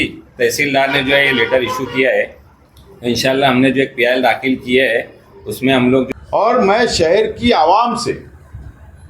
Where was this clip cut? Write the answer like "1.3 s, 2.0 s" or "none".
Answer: 6.1 s